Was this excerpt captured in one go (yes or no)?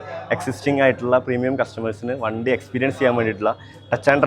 yes